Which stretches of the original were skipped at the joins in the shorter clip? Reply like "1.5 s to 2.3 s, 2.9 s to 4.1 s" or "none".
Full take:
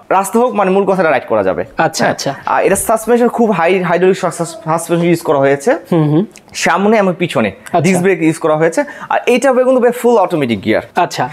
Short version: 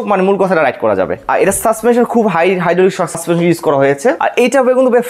1.7 s to 2.4 s, 4.4 s to 4.8 s, 5.8 s to 9.1 s